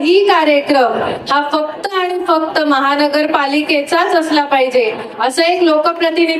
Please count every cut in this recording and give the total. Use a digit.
0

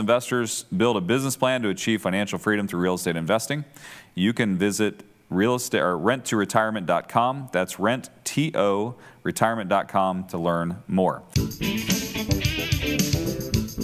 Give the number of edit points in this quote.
1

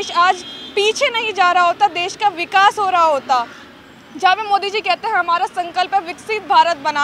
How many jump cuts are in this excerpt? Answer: 0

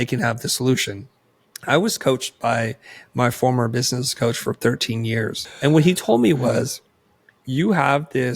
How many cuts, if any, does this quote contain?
2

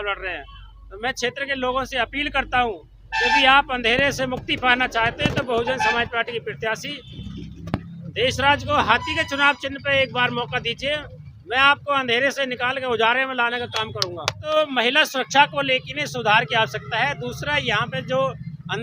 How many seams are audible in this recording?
1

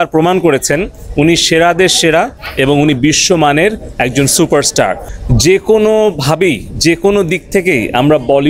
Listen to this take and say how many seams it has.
1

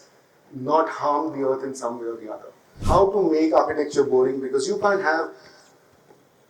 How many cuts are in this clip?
1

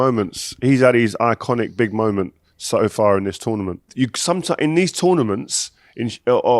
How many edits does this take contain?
1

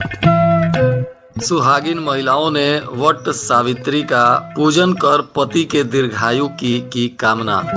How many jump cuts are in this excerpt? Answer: 1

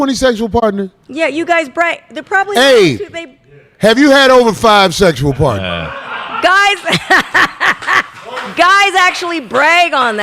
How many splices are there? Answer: 1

